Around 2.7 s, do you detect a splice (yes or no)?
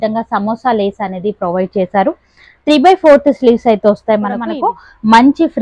no